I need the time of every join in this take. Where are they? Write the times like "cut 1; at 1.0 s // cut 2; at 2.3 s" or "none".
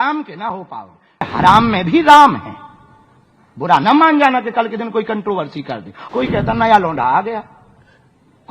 cut 1; at 1.3 s // cut 2; at 5.9 s

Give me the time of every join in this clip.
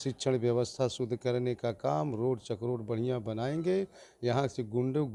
none

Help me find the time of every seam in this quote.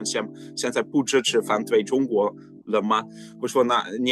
none

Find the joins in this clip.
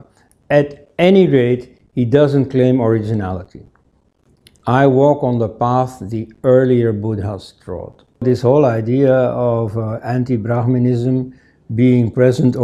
cut 1; at 8.2 s

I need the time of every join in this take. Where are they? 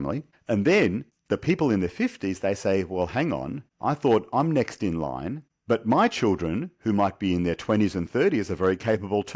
none

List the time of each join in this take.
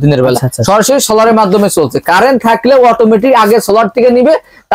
none

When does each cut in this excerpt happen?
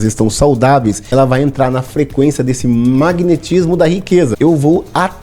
cut 1; at 1.0 s // cut 2; at 4.3 s

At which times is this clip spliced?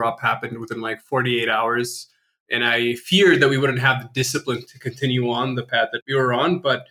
cut 1; at 6.0 s

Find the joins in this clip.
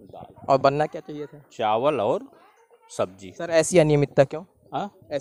none

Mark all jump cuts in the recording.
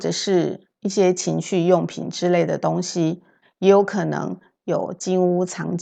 cut 1; at 3.4 s

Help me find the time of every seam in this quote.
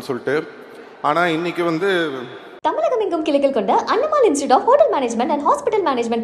cut 1; at 2.4 s

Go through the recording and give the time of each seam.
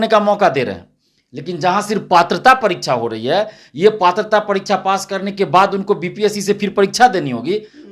none

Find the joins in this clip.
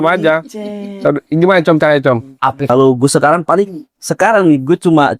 cut 1; at 2.7 s

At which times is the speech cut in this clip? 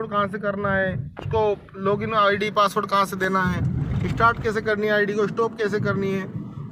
none

